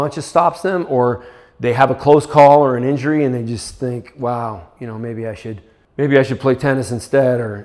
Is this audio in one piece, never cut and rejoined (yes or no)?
no